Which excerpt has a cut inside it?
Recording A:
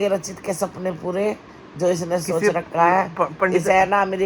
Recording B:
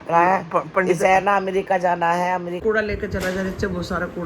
B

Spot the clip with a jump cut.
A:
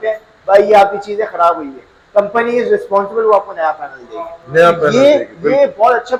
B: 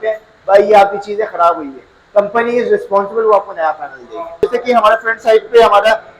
B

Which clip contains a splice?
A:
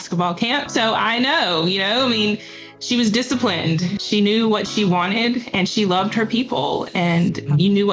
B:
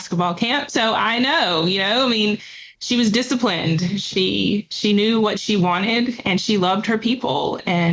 A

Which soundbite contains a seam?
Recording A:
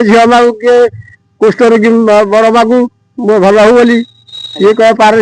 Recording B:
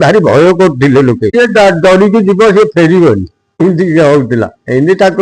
B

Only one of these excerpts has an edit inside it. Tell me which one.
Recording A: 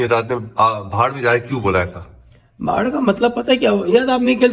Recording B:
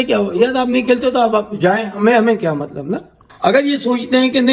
B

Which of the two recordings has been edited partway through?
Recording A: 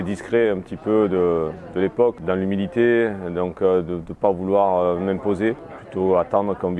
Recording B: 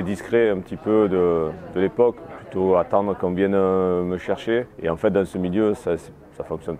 B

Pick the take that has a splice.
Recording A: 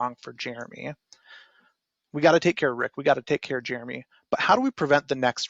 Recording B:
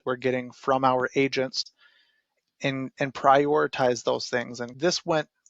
B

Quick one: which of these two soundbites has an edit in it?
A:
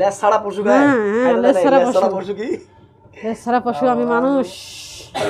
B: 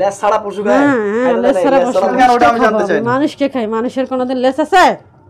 B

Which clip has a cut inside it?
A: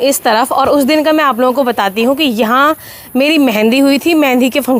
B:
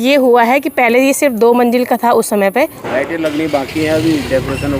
B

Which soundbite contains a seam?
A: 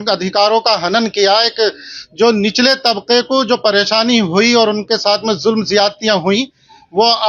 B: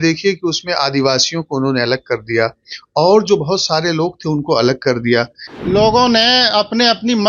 B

